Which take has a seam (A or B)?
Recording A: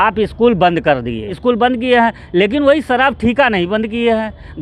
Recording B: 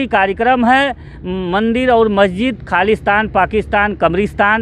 A